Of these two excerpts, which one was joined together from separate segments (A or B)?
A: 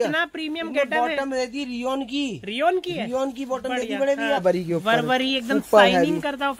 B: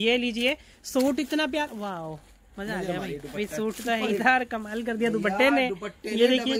A